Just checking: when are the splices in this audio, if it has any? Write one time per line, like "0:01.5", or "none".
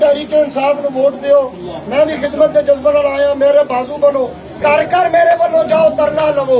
0:04.4